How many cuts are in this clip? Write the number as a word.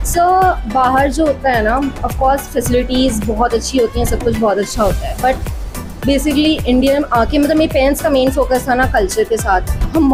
zero